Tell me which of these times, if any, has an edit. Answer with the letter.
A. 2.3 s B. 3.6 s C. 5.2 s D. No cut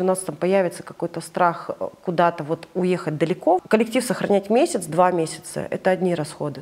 B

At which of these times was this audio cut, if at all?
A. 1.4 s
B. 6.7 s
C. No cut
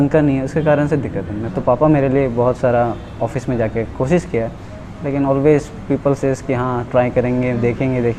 A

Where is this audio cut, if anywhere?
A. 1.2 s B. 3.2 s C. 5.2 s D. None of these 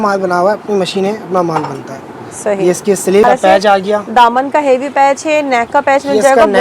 B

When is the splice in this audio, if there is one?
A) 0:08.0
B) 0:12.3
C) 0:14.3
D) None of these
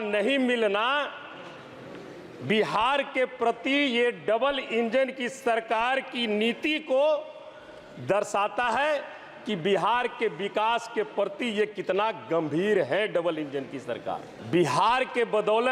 C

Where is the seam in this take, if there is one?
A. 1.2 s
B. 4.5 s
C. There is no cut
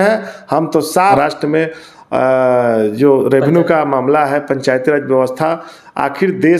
A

